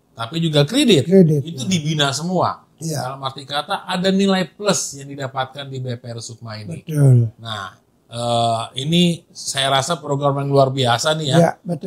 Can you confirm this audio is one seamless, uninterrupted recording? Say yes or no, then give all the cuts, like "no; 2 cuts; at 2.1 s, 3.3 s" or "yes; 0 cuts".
yes; 0 cuts